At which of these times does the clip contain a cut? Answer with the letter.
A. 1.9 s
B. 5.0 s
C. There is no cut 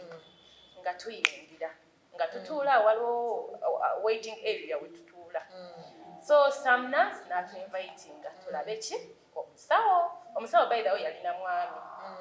C